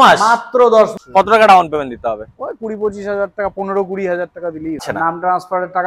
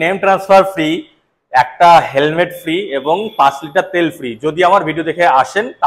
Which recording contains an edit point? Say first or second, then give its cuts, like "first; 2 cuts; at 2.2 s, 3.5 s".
first; 2 cuts; at 0.9 s, 4.9 s